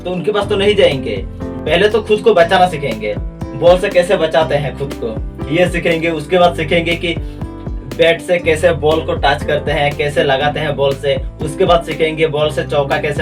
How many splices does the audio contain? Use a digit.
1